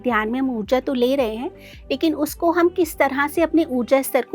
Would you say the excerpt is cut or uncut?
uncut